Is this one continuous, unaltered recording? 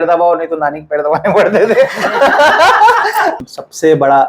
no; 1 cut; at 3.4 s

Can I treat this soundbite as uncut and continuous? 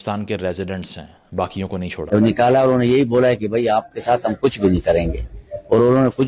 no; 1 cut; at 1.9 s

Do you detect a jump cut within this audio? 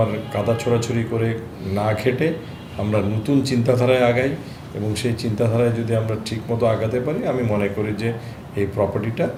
no; 0 cuts

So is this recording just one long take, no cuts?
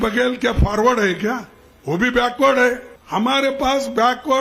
no; 1 cut; at 2.9 s

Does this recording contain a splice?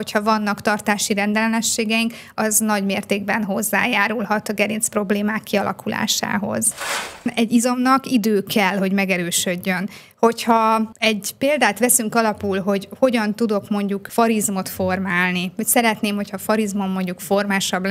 yes; 1 cut; at 7.3 s

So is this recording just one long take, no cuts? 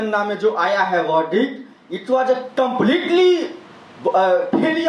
yes; 0 cuts

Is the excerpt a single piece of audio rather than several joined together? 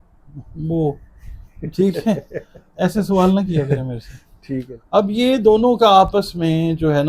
no; 1 cut; at 4.7 s

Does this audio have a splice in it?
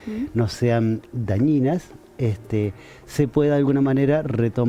no; 0 cuts

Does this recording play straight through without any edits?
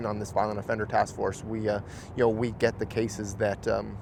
yes; 0 cuts

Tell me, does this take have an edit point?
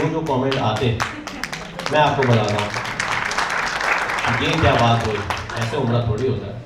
no; 0 cuts

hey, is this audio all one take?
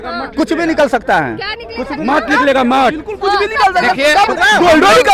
yes; 0 cuts

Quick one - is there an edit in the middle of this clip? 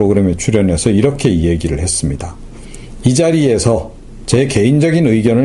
yes; 1 cut; at 2.2 s

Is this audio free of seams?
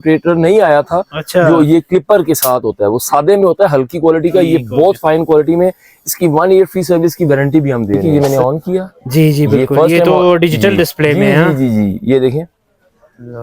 no; 1 cut; at 8.0 s

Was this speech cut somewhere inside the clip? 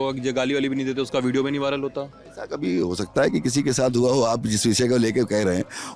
no; 0 cuts

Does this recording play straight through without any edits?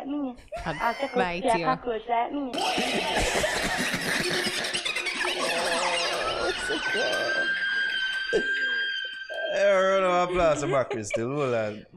no; 1 cut; at 2.5 s

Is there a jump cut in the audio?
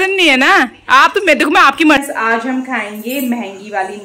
yes; 1 cut; at 2.0 s

